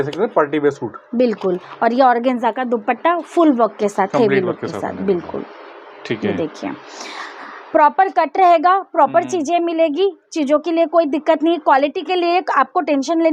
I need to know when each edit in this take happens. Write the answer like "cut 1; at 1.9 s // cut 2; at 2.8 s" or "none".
none